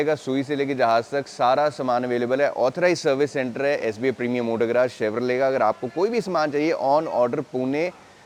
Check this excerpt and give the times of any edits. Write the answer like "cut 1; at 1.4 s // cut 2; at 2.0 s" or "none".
none

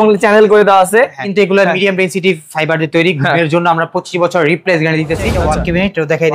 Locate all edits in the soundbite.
cut 1; at 1.3 s // cut 2; at 5.4 s

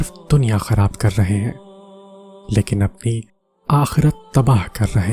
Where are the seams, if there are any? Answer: none

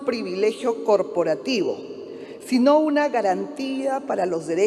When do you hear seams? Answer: none

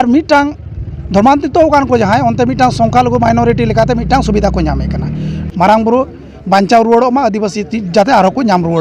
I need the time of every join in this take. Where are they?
cut 1; at 5.4 s

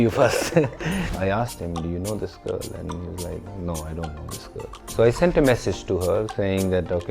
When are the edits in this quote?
cut 1; at 1.1 s // cut 2; at 4.9 s

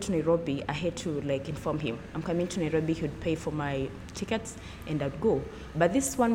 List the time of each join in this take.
none

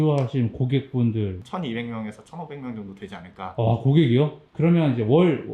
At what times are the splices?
cut 1; at 1.4 s // cut 2; at 4.4 s

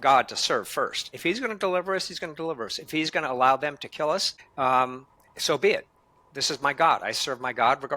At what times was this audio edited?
cut 1; at 1.1 s // cut 2; at 4.4 s

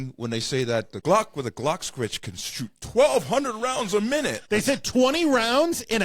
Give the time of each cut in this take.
cut 1; at 1.0 s // cut 2; at 4.4 s

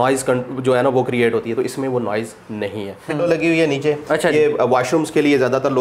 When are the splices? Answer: cut 1; at 3.2 s

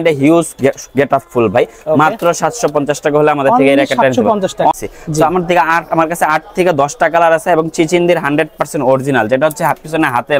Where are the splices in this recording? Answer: cut 1; at 4.7 s

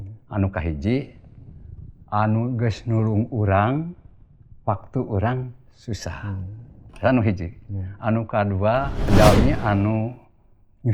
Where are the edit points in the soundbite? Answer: cut 1; at 9.1 s

